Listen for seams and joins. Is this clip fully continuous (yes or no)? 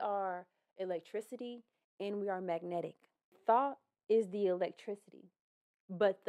no